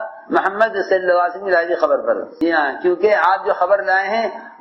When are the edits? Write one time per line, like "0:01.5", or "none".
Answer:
0:02.3